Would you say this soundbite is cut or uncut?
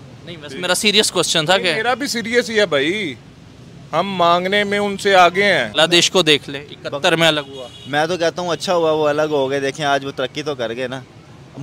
cut